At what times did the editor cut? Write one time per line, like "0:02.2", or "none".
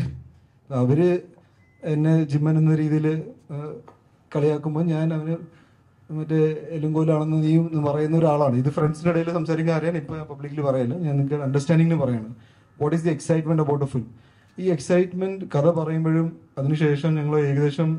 none